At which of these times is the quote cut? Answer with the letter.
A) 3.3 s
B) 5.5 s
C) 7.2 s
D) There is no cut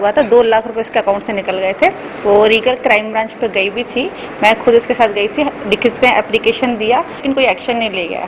C